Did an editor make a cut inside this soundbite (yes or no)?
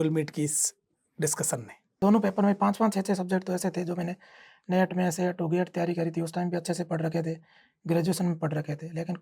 yes